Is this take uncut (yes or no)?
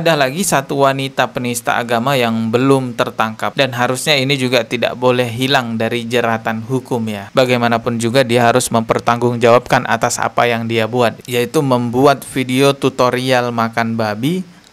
yes